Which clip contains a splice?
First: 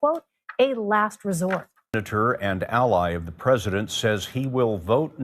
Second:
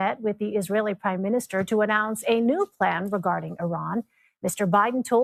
first; 1 cut; at 1.9 s

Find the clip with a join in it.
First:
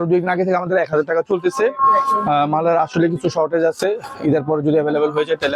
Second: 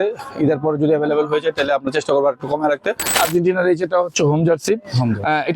second; 1 cut; at 3.2 s

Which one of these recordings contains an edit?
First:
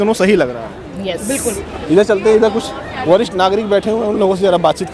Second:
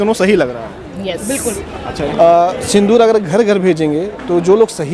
second; 1 cut; at 1.8 s

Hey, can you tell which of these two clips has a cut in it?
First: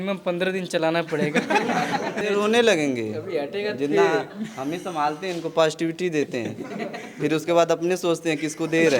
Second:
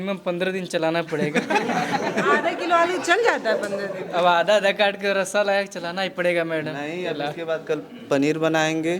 first; 1 cut; at 2.2 s

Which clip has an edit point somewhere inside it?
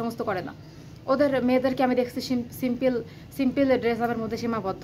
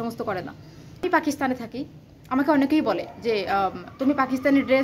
second; 1 cut; at 1.0 s

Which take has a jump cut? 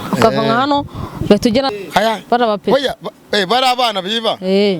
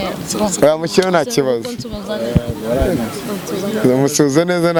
first; 1 cut; at 1.7 s

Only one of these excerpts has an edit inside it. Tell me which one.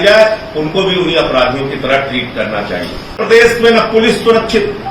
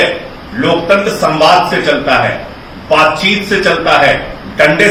first; 1 cut; at 3.2 s

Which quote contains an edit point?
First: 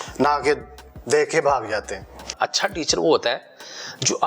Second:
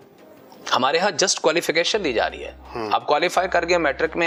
first; 1 cut; at 2.3 s

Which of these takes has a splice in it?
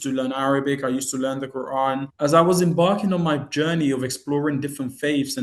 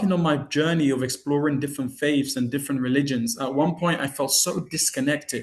first; 1 cut; at 2.1 s

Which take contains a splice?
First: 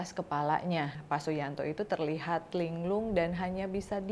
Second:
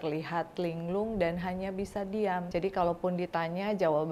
first; 1 cut; at 1.0 s

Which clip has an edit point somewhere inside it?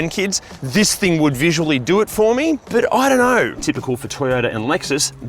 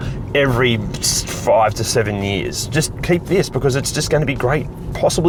first; 2 cuts; at 2.6 s, 3.6 s

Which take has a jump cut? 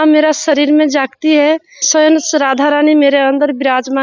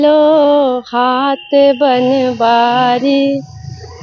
first; 1 cut; at 1.9 s

